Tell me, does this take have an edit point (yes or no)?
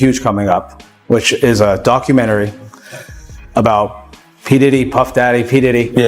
no